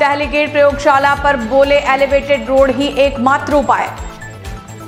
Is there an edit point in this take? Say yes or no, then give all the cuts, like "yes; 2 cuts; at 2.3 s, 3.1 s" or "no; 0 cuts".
no; 0 cuts